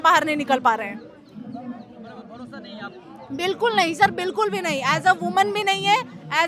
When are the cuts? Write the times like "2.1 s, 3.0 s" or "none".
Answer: none